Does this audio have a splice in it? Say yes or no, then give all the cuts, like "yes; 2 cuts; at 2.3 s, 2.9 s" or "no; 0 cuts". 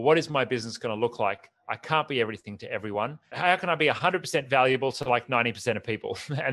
yes; 1 cut; at 3.3 s